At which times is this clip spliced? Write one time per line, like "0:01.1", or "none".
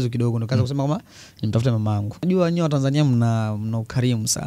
0:02.2